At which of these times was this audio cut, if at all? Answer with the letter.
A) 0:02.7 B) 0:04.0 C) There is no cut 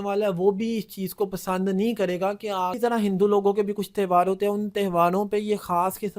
A